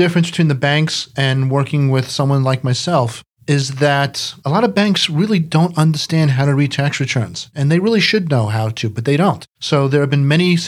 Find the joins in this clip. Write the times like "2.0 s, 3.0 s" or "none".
4.3 s